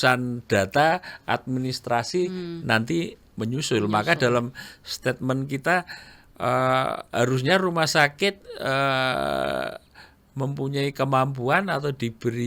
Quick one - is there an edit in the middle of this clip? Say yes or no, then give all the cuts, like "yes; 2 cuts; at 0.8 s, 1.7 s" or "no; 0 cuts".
no; 0 cuts